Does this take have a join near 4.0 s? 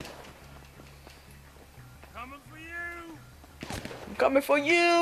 yes; 1 cut; at 4.0 s

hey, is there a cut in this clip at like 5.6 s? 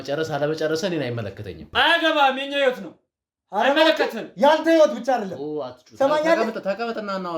no; 1 cut; at 1.6 s

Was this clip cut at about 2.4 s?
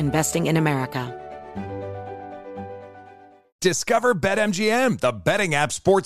no; 1 cut; at 1.1 s

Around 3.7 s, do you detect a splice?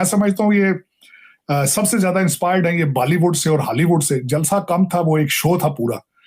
no; 0 cuts

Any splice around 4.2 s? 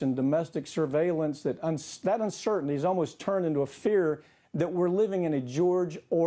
no; 0 cuts

